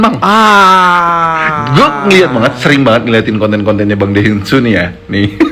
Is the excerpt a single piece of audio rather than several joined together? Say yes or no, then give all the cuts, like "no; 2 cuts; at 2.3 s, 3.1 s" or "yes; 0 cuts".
yes; 0 cuts